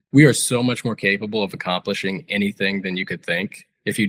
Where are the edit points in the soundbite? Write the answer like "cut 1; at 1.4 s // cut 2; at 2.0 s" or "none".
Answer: none